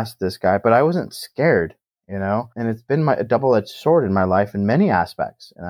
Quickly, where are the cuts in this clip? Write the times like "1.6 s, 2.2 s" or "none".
none